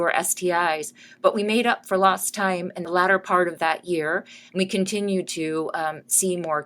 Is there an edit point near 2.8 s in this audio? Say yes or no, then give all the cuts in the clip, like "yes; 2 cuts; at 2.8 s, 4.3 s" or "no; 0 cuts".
yes; 1 cut; at 2.8 s